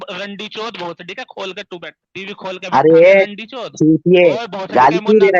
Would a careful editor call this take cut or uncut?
cut